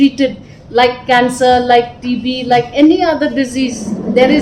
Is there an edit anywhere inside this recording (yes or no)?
no